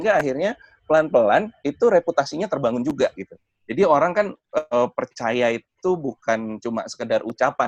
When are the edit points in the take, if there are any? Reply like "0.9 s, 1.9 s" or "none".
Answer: none